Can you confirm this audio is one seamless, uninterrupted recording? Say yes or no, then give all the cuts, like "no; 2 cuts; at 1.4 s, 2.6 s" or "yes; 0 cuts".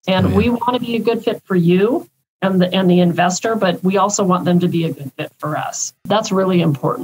no; 1 cut; at 6.0 s